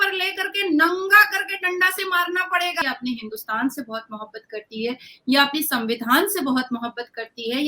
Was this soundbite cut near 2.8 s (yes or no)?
yes